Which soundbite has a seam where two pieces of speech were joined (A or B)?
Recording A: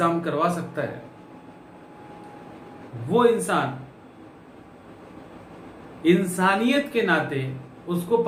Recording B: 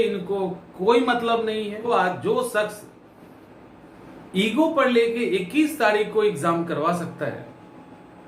B